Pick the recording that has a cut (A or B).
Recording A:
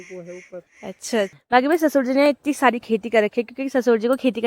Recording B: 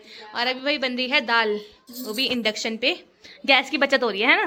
A